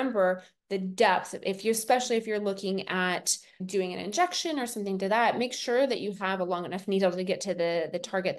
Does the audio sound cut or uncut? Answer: uncut